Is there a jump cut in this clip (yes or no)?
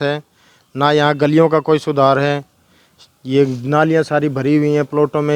no